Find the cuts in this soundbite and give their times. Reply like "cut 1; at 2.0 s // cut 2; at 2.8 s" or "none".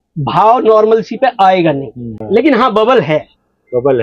cut 1; at 2.1 s